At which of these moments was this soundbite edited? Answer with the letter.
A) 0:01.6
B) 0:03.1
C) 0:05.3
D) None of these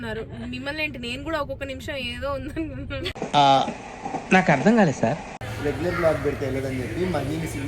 C